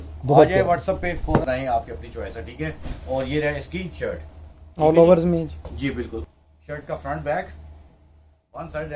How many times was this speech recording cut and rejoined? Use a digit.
2